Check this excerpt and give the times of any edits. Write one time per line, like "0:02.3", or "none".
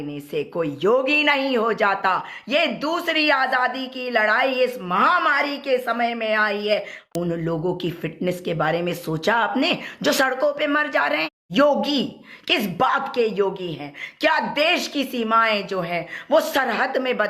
0:07.0
0:11.4